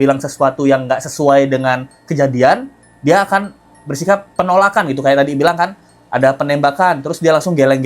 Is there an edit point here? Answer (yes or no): no